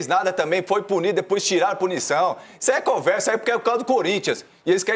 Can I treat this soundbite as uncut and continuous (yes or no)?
yes